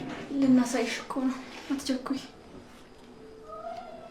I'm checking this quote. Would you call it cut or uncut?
uncut